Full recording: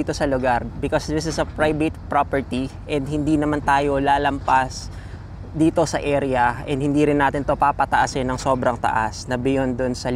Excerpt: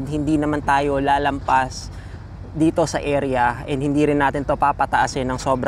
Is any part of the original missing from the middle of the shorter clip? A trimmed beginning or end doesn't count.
no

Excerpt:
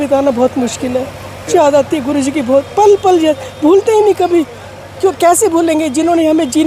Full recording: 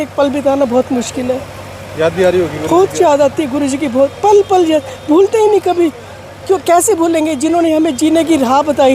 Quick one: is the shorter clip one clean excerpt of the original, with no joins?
no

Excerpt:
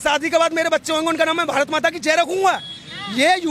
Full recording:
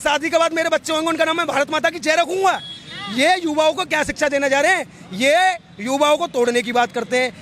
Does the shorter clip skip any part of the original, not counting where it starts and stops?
no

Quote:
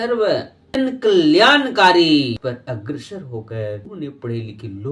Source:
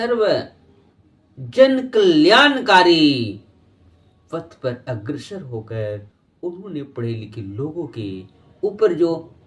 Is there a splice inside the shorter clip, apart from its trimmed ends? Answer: yes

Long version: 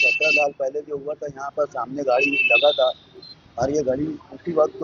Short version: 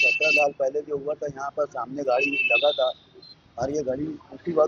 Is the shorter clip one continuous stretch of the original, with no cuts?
yes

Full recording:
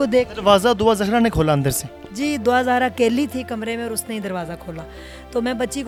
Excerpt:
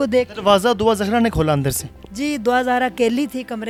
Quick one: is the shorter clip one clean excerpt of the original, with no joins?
yes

